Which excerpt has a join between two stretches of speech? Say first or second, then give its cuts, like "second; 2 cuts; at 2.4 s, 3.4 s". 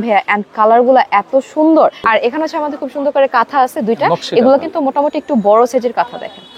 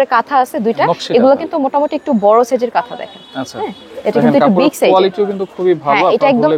first; 1 cut; at 2.0 s